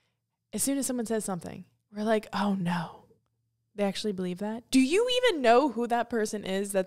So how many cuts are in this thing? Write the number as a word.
zero